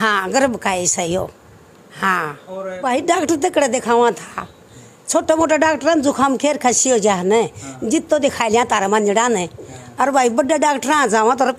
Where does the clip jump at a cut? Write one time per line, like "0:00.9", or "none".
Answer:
0:02.8